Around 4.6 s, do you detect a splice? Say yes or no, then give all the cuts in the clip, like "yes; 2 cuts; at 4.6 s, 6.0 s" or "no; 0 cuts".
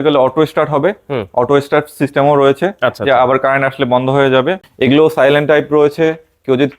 yes; 1 cut; at 4.6 s